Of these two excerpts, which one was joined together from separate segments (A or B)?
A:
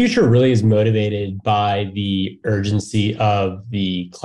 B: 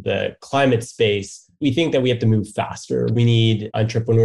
B